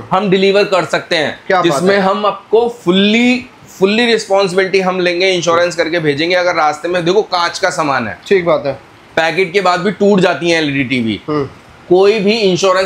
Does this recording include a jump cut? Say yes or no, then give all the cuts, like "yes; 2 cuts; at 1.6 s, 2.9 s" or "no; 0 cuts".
no; 0 cuts